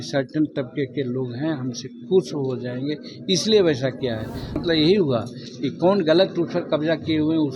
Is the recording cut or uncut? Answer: cut